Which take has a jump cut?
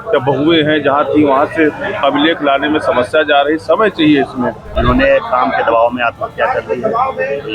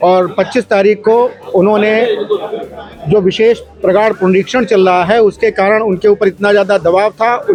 first; 1 cut; at 4.7 s

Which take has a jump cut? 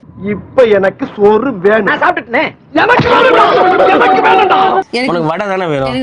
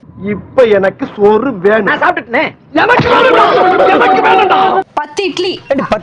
first; 1 cut; at 4.9 s

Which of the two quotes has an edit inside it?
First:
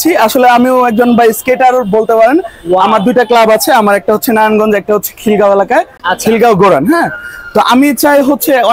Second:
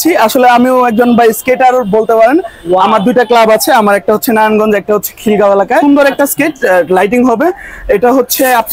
second; 1 cut; at 5.8 s

